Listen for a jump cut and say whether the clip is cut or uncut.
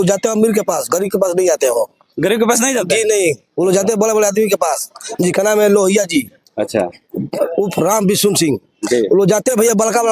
uncut